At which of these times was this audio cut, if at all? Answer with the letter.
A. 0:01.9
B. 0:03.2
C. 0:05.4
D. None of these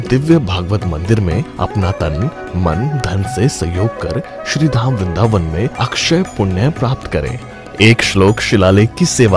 A